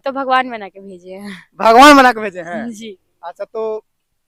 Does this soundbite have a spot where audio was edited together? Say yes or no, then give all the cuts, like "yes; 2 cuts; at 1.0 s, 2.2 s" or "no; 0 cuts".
no; 0 cuts